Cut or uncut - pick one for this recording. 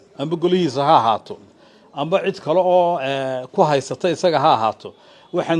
uncut